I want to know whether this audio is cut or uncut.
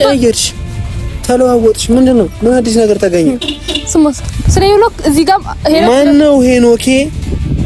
cut